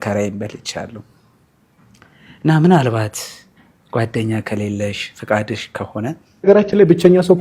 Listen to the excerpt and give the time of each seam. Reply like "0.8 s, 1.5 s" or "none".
6.3 s